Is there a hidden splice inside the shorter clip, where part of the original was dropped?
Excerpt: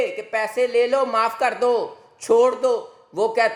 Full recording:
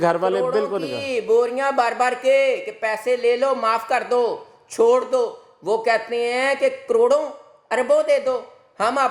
no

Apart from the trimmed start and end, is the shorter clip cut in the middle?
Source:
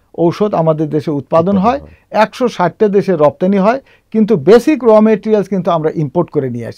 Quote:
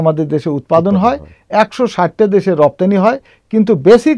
no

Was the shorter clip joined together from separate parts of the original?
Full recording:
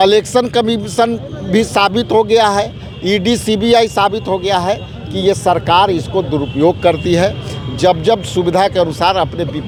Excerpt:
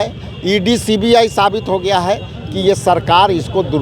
no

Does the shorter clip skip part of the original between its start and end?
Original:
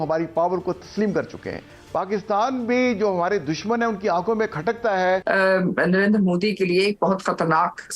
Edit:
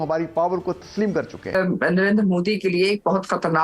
yes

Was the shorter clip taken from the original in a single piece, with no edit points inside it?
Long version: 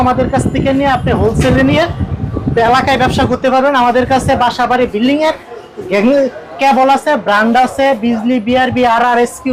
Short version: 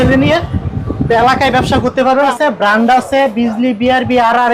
no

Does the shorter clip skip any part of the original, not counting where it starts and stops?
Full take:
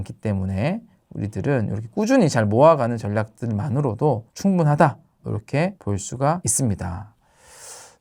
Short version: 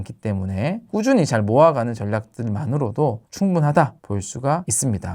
yes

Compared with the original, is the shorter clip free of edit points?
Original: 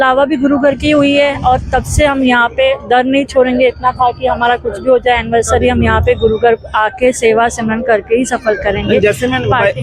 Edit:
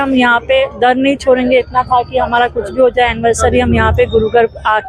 yes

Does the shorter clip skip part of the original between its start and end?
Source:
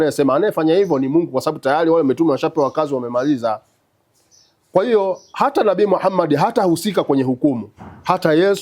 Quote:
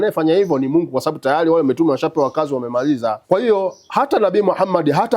yes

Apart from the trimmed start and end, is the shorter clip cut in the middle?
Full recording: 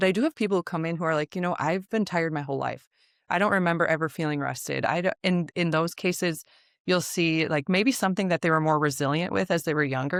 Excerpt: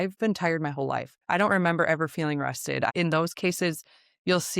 yes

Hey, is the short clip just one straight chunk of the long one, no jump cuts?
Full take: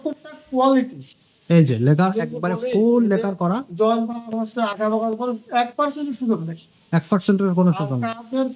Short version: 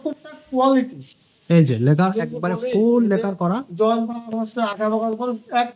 yes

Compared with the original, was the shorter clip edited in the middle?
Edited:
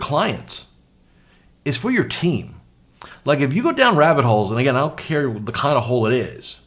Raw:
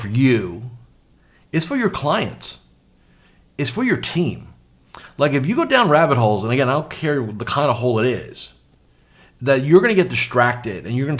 no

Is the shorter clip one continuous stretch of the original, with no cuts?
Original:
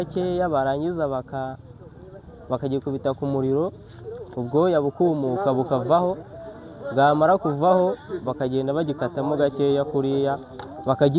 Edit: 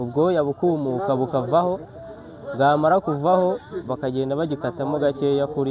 yes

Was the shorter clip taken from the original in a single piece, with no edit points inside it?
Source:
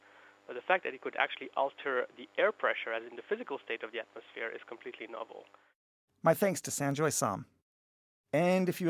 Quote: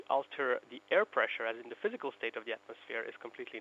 yes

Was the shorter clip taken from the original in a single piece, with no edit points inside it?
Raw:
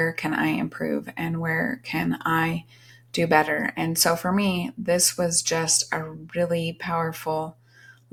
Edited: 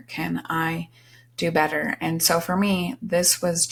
yes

